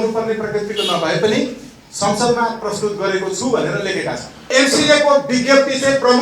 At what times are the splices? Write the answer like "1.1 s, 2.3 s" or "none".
4.5 s